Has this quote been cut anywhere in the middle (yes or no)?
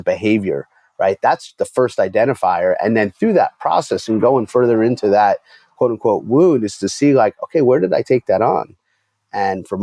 no